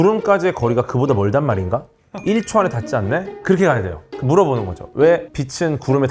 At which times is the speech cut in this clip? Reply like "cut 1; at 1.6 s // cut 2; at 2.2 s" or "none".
none